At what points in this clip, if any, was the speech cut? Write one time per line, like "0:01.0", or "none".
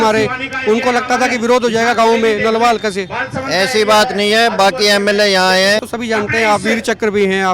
0:05.9